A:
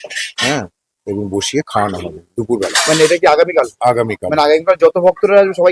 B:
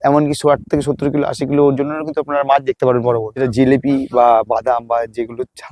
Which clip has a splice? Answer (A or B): B